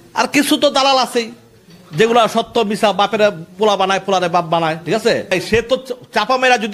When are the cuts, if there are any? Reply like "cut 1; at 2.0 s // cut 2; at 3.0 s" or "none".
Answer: cut 1; at 5.3 s